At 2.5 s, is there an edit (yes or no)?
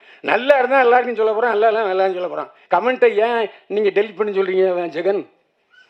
yes